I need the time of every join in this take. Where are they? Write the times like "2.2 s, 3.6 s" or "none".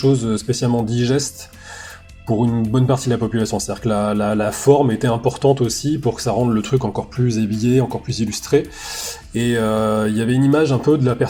none